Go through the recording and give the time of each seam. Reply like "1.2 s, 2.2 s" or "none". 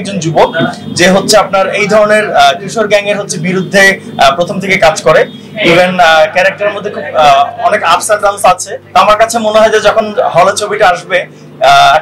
8.7 s